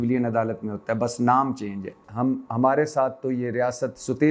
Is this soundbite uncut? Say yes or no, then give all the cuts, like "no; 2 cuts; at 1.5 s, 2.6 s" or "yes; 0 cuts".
no; 1 cut; at 2.0 s